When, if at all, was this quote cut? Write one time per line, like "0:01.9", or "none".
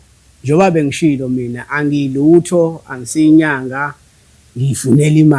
none